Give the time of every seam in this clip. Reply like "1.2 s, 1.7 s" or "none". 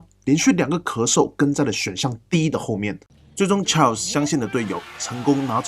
3.1 s

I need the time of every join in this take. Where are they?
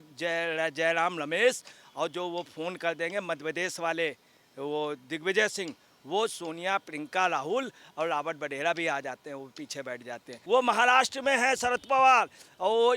10.3 s

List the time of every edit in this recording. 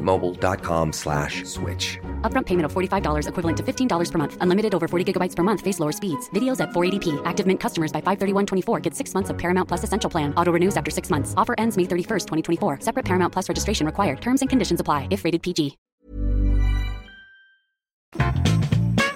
none

